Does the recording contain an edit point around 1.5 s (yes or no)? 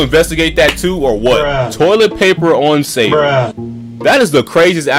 yes